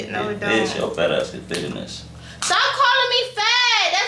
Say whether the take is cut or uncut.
cut